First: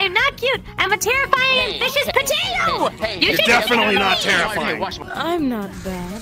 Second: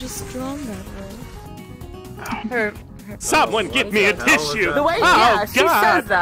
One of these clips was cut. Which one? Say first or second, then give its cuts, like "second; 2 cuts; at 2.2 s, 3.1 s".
first; 1 cut; at 4.9 s